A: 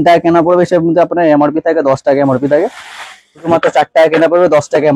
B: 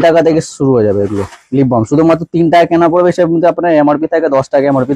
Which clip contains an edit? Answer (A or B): A